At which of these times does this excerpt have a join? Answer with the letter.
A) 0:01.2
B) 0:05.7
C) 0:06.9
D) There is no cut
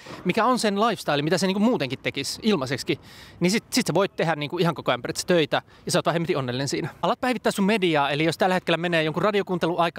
C